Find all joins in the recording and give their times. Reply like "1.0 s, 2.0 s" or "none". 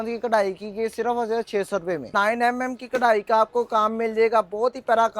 2.1 s